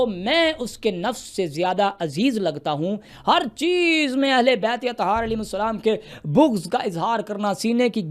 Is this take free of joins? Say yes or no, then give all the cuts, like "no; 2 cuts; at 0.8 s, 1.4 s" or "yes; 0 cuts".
no; 1 cut; at 3.1 s